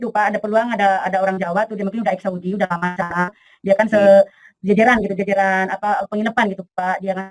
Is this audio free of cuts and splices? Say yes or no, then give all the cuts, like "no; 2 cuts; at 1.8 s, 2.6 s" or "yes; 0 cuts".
yes; 0 cuts